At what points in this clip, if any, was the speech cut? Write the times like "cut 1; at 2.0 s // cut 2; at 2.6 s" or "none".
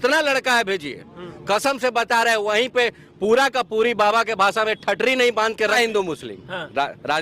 cut 1; at 5.8 s